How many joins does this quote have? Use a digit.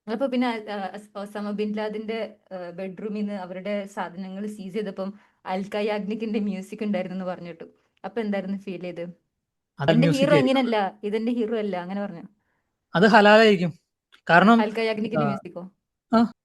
1